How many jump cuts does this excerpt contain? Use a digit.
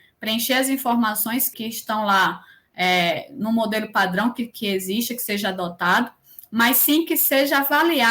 1